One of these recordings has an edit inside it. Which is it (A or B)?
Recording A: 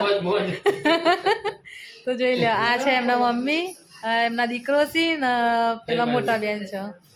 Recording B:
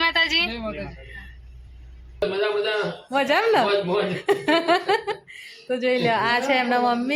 B